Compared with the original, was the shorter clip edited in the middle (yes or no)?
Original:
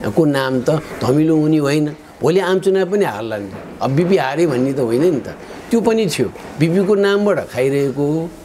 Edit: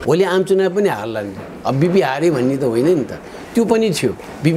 no